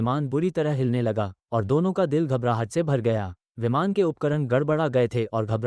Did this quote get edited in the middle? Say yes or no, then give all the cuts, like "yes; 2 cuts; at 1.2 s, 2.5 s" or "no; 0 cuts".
no; 0 cuts